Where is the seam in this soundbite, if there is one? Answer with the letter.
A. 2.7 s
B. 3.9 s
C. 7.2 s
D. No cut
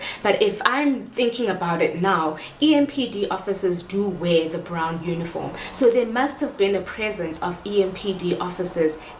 D